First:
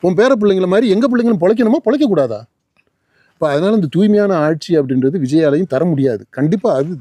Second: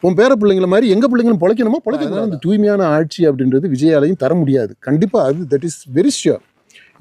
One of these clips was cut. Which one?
second; 1 cut; at 2.1 s

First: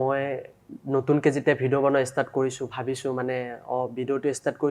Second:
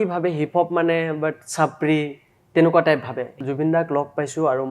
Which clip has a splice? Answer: second; 1 cut; at 3.4 s

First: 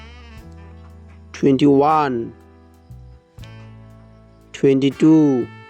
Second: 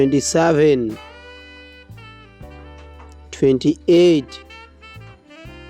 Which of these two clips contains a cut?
second; 3 cuts; at 1.6 s, 3.3 s, 4.5 s

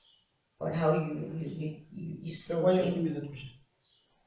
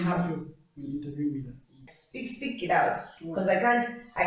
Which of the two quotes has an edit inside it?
second; 1 cut; at 1.9 s

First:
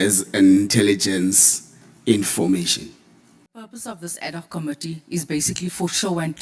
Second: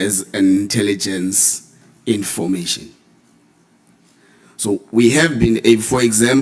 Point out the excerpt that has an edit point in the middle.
first; 1 cut; at 3.7 s

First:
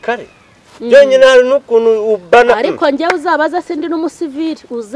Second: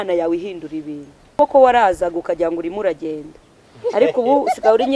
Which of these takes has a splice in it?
second; 1 cut; at 1.2 s

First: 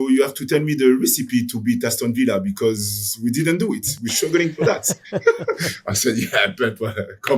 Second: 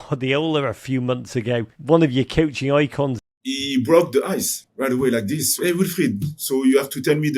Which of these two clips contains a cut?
second; 4 cuts; at 1.7 s, 3.2 s, 4.6 s, 5.5 s

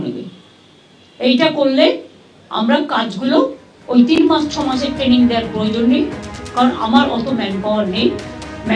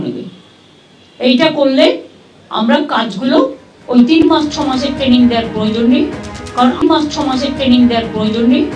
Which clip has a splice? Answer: second; 2 cuts; at 4.2 s, 6.8 s

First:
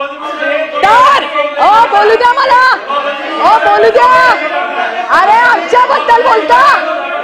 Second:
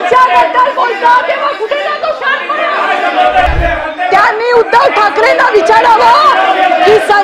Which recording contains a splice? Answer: second; 1 cut; at 3.5 s

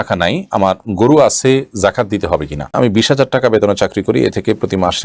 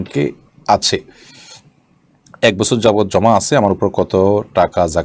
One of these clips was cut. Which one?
first; 1 cut; at 2.7 s

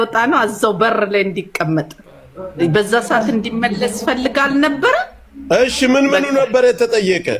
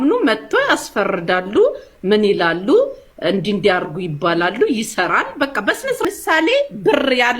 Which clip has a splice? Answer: second; 1 cut; at 6.0 s

